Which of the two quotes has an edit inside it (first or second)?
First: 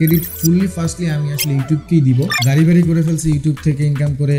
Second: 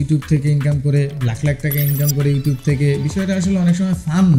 first